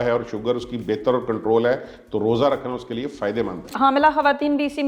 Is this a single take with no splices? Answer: no; 1 cut; at 3.7 s

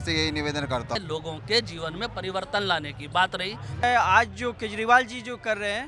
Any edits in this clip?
yes; 2 cuts; at 1.0 s, 3.8 s

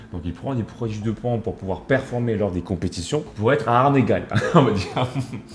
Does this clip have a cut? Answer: yes; 1 cut; at 3.3 s

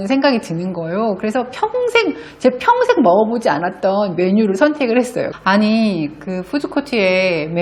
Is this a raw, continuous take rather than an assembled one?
no; 1 cut; at 5.3 s

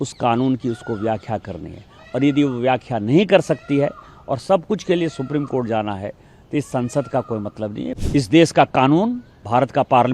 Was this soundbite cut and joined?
yes; 1 cut; at 7.9 s

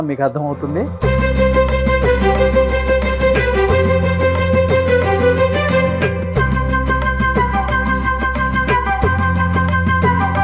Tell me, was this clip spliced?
no; 0 cuts

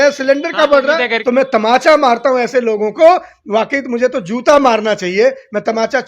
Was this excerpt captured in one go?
no; 1 cut; at 1.1 s

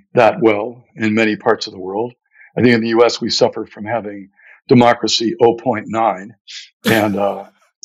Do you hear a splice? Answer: no; 0 cuts

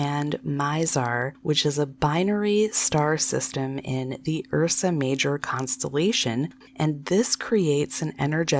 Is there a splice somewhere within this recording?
yes; 1 cut; at 6.5 s

